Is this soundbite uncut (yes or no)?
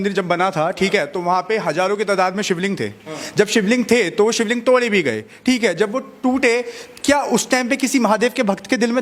yes